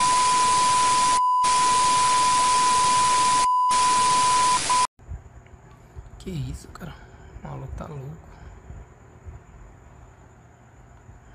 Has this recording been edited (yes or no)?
yes